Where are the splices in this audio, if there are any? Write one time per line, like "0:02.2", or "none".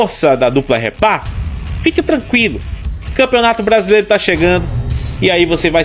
none